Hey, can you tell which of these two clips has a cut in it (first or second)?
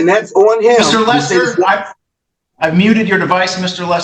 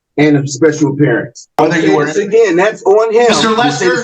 second